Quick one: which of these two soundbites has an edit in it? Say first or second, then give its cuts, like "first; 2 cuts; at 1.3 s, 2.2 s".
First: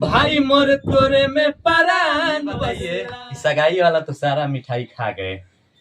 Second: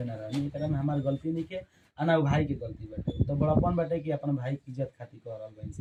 first; 1 cut; at 2.9 s